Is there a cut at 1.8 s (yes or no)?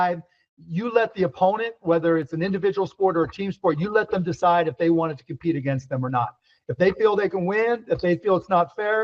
no